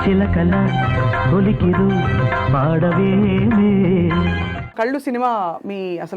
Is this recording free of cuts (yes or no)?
no